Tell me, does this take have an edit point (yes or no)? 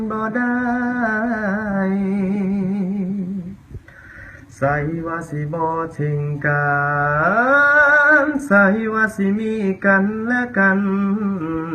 yes